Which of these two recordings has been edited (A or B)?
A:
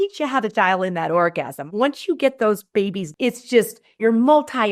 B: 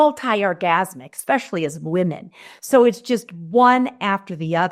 A